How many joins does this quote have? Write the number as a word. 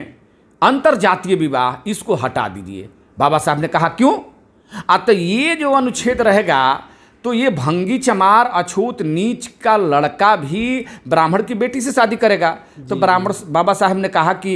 zero